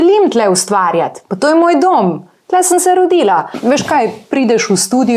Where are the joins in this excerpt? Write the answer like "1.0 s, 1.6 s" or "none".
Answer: 3.5 s